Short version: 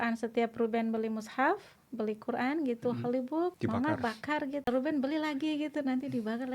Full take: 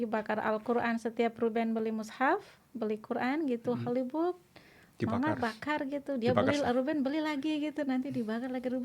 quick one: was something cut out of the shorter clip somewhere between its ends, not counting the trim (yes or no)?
yes